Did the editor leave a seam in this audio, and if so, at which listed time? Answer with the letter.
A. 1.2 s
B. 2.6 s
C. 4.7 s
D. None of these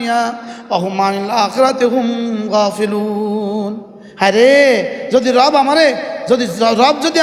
D